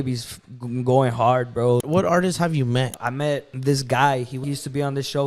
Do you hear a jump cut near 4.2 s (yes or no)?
no